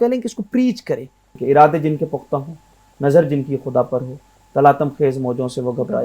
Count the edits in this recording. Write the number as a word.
one